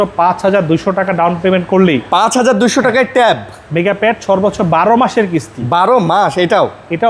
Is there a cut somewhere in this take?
no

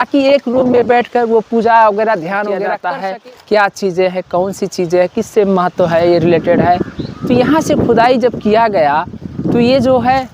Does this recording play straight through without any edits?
no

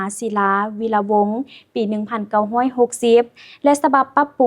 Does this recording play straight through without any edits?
yes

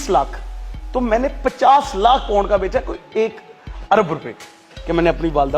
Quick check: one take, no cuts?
yes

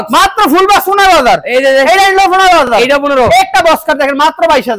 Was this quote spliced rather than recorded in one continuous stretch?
no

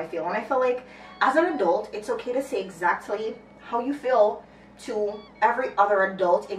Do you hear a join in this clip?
no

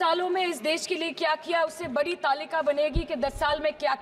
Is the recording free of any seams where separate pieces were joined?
yes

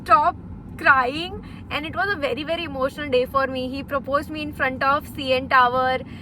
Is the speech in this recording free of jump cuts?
yes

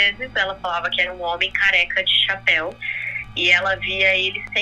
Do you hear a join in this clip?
yes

